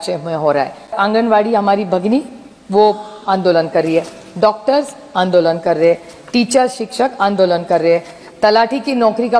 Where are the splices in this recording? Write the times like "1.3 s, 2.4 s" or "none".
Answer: 0.9 s